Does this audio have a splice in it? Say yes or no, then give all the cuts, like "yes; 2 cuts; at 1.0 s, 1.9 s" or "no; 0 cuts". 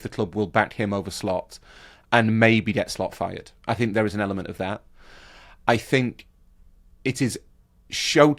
no; 0 cuts